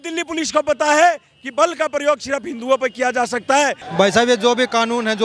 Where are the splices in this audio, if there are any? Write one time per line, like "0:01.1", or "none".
0:03.8